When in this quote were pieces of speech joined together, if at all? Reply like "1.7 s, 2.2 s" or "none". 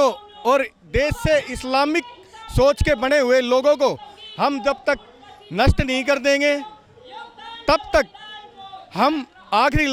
none